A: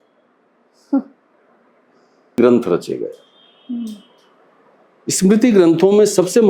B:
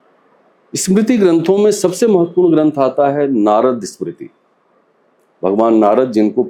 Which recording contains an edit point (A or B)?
A